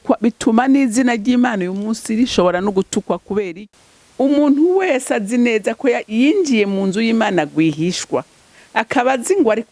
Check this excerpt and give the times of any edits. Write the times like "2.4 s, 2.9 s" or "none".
3.6 s